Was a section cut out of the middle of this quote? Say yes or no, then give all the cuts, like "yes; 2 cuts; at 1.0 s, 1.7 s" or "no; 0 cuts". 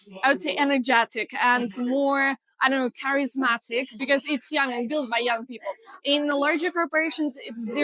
no; 0 cuts